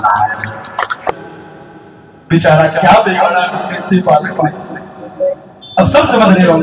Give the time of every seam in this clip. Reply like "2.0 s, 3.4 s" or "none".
1.2 s